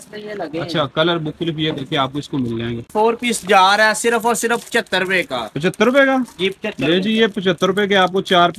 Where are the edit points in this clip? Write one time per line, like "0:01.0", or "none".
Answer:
0:02.9